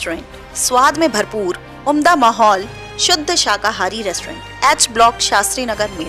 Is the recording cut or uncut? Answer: uncut